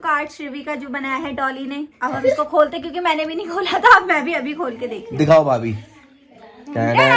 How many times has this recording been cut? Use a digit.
0